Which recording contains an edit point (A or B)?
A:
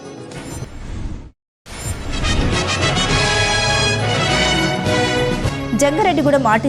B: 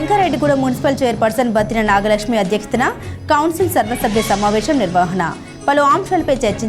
A